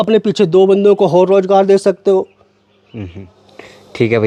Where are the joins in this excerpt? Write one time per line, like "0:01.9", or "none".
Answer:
none